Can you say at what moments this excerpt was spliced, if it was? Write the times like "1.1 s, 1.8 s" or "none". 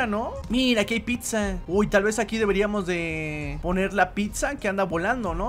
none